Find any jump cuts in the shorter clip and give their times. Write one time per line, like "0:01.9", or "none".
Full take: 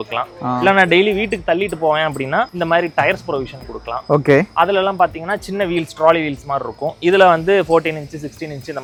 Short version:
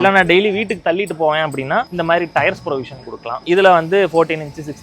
0:03.4

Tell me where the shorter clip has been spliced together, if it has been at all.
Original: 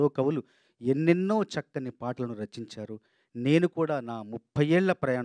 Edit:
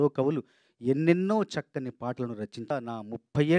0:02.7

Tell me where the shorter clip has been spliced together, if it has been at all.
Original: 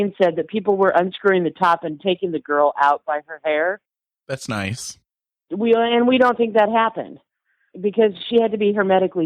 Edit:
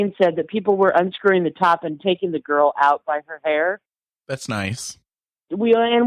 none

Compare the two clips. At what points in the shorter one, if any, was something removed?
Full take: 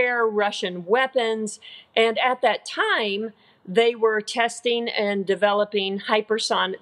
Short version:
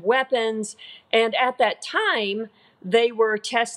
none

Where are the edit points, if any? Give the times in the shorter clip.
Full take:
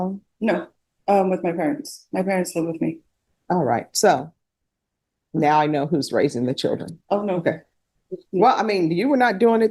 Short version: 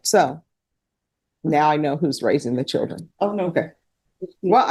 none

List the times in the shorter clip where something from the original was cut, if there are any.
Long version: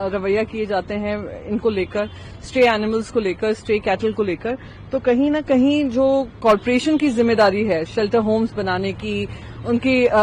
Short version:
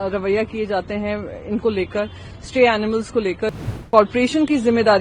0:03.7

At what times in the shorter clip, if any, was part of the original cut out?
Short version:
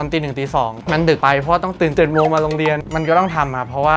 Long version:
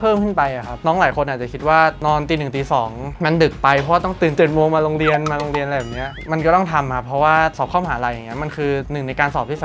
0:01.1
0:02.8

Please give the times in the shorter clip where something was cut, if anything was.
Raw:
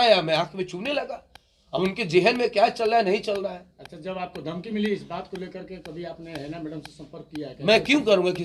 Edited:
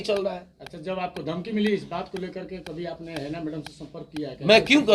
none

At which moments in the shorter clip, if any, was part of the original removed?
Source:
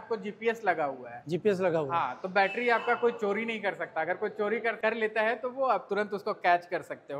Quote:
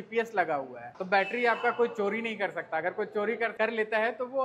0:00.9

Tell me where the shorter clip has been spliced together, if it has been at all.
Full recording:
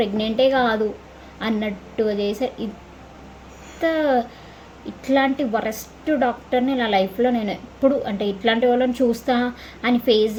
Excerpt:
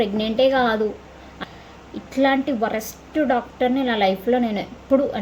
0:01.4

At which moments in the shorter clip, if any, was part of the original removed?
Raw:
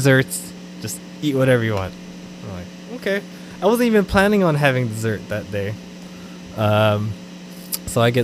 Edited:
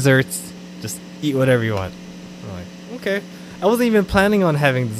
none

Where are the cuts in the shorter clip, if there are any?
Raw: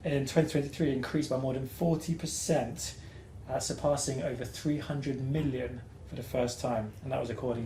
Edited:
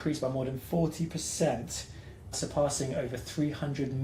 0:02.4

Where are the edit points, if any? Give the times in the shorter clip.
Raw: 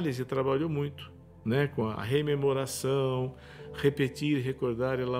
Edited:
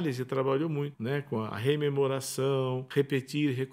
0:01.0
0:02.8

